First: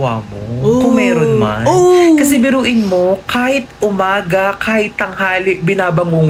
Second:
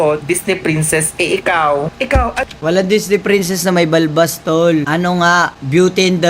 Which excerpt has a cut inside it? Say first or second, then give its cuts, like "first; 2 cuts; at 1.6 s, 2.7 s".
second; 2 cuts; at 2.5 s, 4.9 s